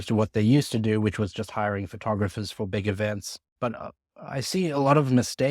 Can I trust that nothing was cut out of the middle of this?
no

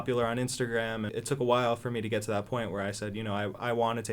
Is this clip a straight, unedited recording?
no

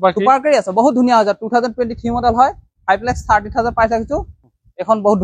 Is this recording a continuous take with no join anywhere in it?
yes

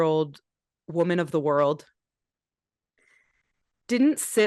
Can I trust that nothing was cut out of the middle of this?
yes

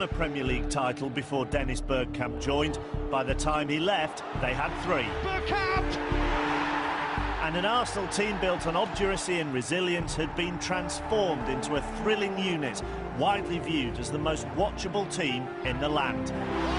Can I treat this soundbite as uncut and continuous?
no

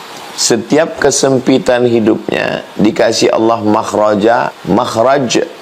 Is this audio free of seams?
no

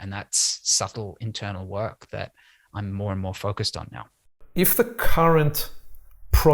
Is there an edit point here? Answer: yes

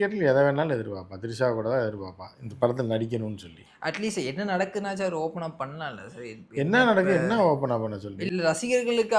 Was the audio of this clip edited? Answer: yes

